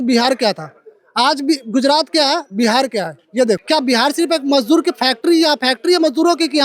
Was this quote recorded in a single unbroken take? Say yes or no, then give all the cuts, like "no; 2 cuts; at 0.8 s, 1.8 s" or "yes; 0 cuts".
no; 1 cut; at 3.6 s